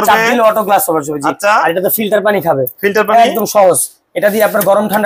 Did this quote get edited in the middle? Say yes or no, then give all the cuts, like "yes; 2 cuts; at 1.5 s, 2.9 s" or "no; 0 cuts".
no; 0 cuts